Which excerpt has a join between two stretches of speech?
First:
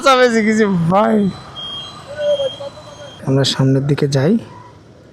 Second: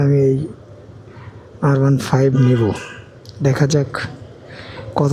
first; 1 cut; at 3.2 s

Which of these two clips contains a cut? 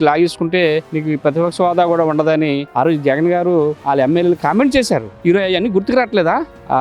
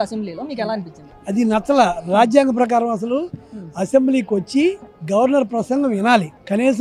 first; 4 cuts; at 0.9 s, 2.6 s, 3.8 s, 5.1 s

